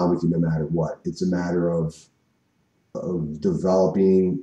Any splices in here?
no; 0 cuts

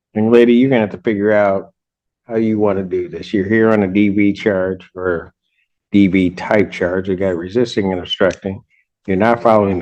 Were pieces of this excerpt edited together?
no; 0 cuts

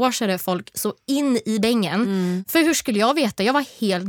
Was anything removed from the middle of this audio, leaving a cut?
yes; 1 cut; at 2.4 s

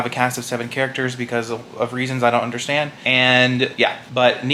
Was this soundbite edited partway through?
no; 0 cuts

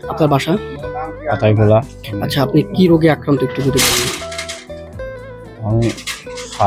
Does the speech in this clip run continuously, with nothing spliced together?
yes; 0 cuts

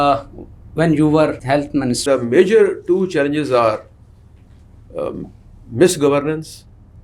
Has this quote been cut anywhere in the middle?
yes; 1 cut; at 1.6 s

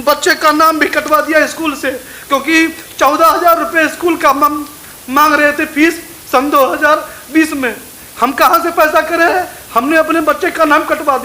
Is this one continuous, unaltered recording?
no; 1 cut; at 9.5 s

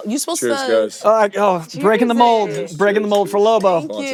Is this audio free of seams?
yes; 0 cuts

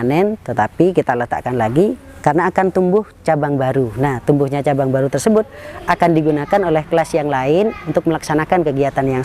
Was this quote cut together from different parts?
no; 0 cuts

